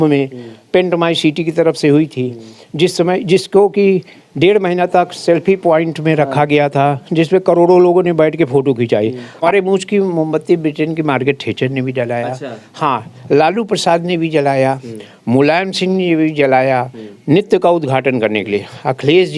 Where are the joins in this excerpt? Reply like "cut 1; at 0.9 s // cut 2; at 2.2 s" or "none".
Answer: cut 1; at 9.4 s